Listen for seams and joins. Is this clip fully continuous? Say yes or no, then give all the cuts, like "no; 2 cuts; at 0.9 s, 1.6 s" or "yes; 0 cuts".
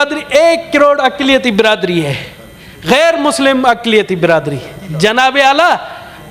yes; 0 cuts